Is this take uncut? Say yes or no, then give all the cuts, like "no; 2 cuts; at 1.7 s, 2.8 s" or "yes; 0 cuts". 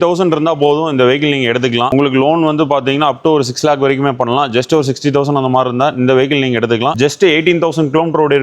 no; 2 cuts; at 1.9 s, 6.9 s